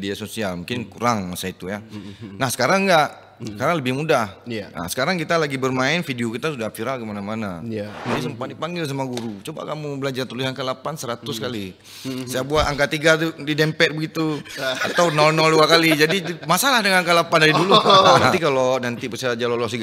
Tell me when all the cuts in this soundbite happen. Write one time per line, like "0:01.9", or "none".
0:08.0
0:18.4